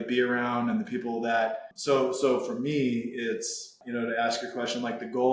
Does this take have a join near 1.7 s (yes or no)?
yes